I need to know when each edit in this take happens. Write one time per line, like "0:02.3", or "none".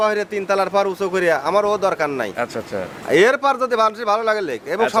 none